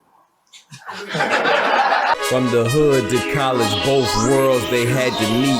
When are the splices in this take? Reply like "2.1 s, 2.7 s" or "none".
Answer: 2.2 s